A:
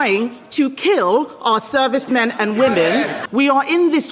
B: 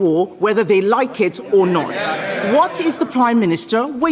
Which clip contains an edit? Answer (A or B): A